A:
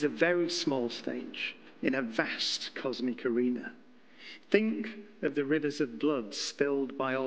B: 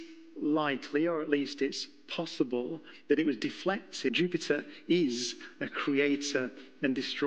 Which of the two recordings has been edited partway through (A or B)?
B